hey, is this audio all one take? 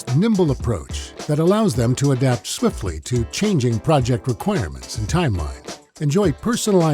yes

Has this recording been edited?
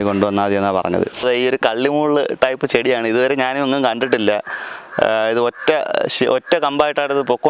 yes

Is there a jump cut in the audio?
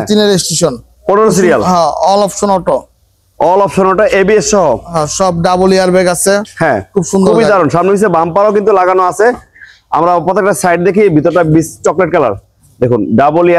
no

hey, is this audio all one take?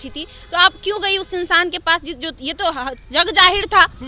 yes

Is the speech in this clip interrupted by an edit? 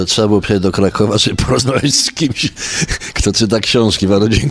no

